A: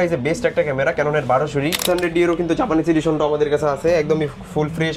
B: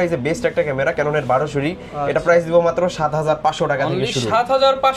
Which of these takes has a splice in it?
A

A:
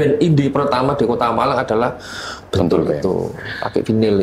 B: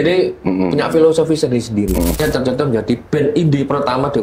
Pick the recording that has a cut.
B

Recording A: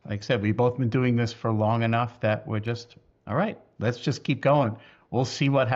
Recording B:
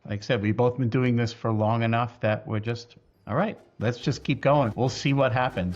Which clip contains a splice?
B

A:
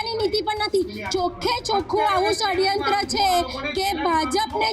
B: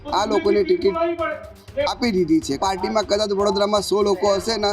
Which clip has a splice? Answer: B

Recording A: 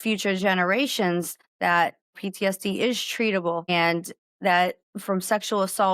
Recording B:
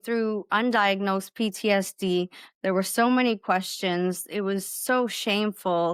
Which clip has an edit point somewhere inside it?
A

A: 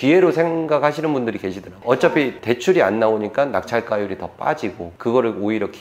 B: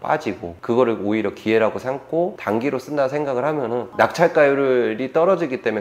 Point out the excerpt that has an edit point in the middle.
B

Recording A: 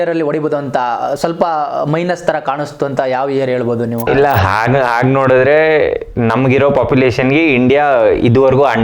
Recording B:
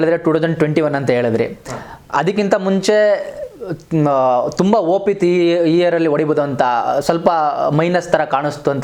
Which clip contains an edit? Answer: A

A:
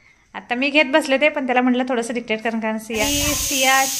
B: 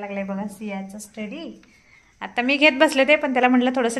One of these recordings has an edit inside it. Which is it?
A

